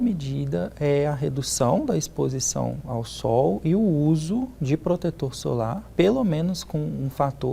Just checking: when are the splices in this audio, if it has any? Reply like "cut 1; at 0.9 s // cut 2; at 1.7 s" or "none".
cut 1; at 5.9 s